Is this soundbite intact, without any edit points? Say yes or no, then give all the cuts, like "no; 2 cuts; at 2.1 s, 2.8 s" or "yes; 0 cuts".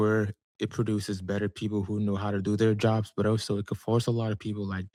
yes; 0 cuts